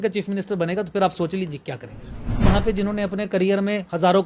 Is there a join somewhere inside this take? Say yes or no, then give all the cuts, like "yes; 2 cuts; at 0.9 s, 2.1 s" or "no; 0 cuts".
yes; 1 cut; at 2.4 s